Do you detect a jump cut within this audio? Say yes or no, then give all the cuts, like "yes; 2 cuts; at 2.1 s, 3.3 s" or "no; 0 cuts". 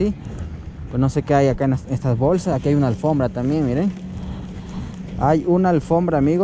no; 0 cuts